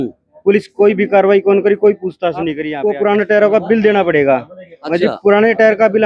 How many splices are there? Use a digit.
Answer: 1